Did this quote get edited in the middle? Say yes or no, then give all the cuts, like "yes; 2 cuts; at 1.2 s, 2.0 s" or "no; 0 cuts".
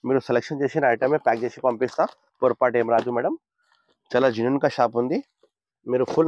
no; 0 cuts